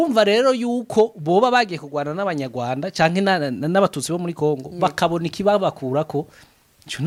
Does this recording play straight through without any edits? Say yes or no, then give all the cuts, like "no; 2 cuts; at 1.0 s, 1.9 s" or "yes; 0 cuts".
yes; 0 cuts